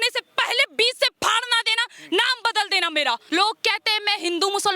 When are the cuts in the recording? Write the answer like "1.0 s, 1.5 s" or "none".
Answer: 3.2 s